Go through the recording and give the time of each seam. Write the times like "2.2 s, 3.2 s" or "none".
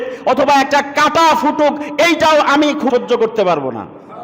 2.9 s